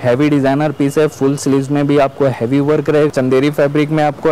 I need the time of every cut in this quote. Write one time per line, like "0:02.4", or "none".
0:03.1